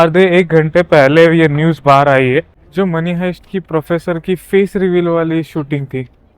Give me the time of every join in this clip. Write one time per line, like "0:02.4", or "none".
0:02.6